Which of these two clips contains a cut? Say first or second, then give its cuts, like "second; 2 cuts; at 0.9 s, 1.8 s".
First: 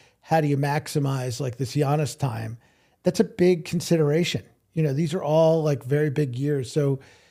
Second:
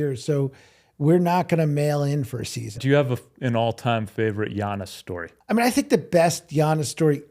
second; 2 cuts; at 2.8 s, 5.3 s